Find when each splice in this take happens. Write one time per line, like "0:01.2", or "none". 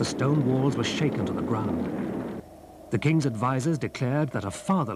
0:02.8